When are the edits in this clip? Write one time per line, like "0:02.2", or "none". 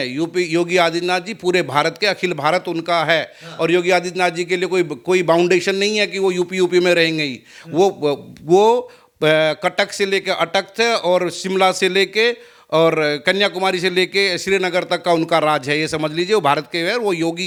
none

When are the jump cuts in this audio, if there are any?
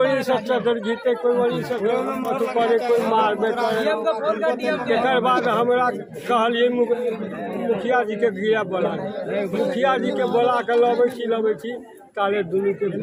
none

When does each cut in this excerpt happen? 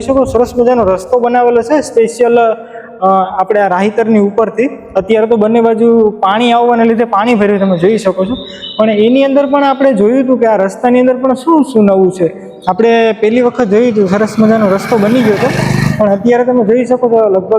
none

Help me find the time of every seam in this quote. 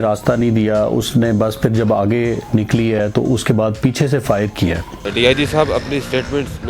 0:04.9

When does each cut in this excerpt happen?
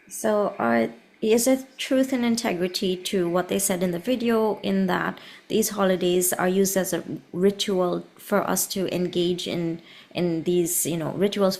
none

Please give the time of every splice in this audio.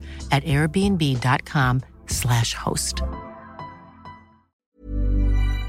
0:04.6

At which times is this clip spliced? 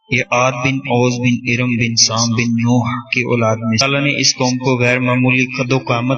none

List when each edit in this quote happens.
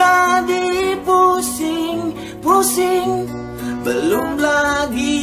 none

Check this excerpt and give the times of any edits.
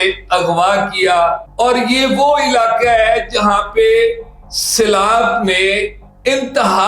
0:01.4

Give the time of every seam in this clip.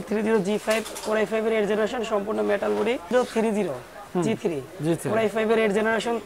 0:03.1

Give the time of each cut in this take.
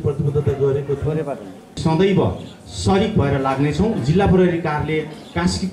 0:01.8

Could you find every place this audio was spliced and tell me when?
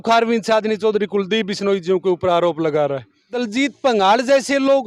0:03.4

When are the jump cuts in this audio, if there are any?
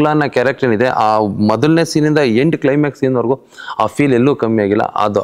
none

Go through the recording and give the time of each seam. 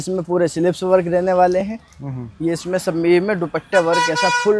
none

